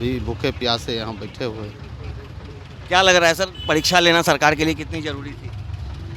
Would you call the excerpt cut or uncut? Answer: uncut